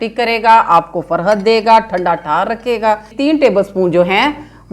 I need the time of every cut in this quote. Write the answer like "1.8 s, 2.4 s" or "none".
3.1 s

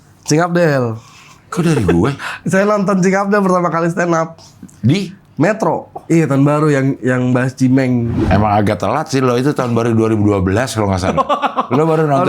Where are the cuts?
5.9 s, 8.1 s

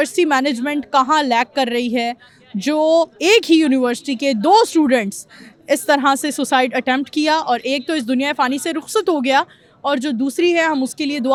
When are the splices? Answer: none

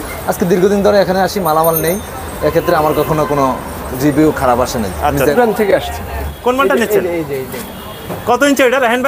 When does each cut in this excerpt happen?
5.3 s, 6.3 s

